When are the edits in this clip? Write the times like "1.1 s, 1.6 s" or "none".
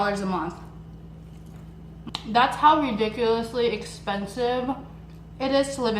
2.1 s